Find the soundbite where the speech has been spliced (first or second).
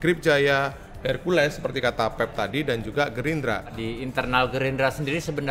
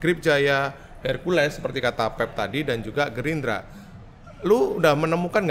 first